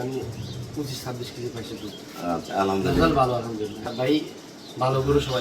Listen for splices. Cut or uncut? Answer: cut